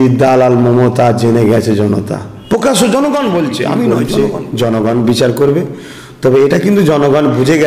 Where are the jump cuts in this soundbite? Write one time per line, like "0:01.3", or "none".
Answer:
0:04.0